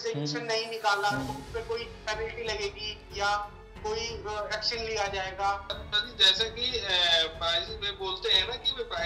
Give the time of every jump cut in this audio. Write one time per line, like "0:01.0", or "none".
0:05.8